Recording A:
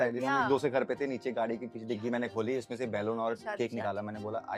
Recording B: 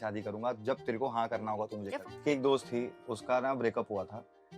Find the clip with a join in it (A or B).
B